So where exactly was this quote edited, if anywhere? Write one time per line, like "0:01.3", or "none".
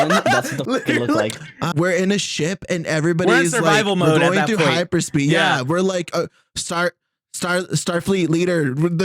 0:01.6